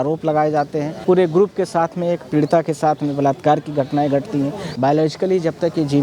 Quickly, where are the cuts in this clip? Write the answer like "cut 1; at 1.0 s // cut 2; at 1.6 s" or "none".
cut 1; at 0.9 s // cut 2; at 4.6 s